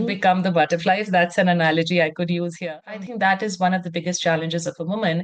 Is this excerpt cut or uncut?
cut